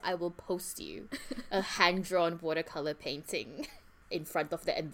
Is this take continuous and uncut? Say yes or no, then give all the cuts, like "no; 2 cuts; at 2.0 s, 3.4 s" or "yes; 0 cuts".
no; 1 cut; at 3.7 s